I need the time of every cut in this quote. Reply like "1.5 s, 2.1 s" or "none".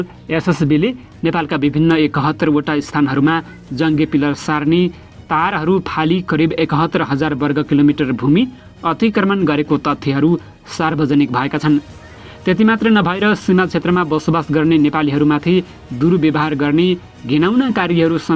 none